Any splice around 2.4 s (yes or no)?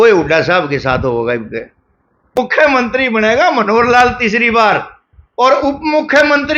yes